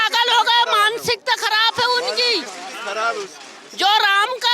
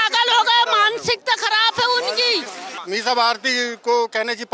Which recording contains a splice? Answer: second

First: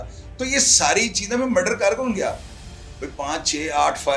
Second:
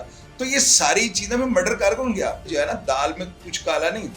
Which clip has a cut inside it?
second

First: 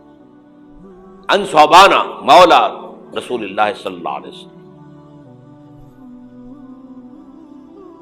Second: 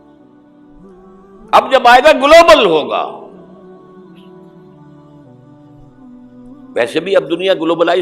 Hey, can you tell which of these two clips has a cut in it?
second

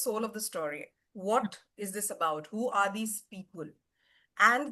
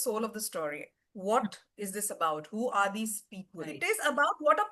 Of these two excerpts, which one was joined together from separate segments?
second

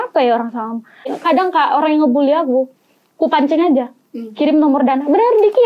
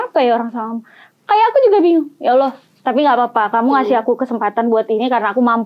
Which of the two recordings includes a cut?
first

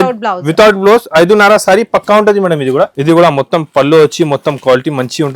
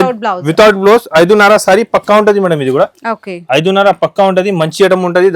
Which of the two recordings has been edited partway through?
first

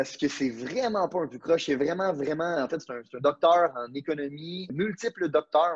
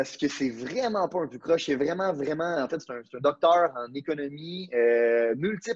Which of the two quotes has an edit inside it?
first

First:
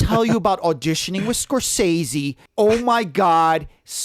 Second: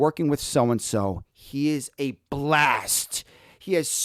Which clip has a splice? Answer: first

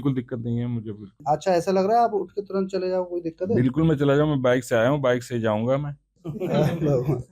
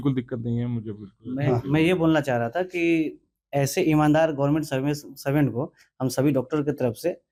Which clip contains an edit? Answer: first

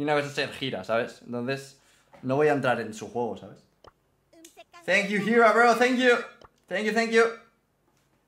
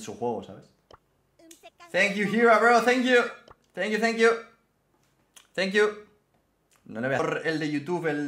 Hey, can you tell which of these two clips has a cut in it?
second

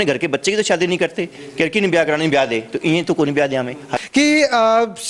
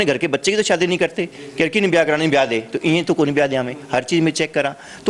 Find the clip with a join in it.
first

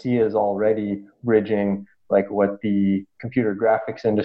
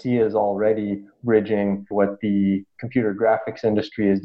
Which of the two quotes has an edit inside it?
second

